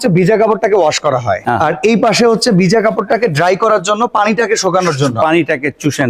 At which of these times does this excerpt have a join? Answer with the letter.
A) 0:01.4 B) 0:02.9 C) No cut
A